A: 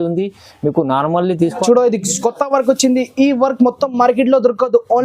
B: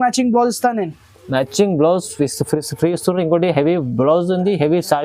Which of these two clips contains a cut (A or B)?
A